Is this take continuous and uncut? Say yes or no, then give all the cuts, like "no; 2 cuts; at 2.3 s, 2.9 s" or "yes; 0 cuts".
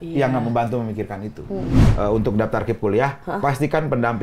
no; 1 cut; at 1.8 s